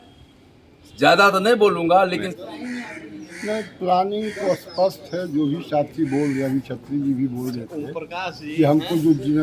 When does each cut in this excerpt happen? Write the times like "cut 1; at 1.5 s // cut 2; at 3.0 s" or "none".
cut 1; at 2.3 s